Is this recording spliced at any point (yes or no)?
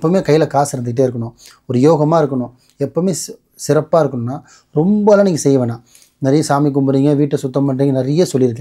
no